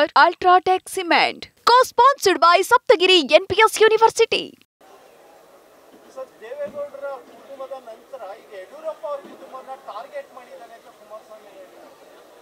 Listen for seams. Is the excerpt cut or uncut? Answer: cut